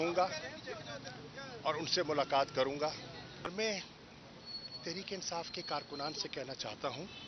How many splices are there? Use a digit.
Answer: 1